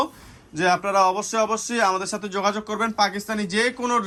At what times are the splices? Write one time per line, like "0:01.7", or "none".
none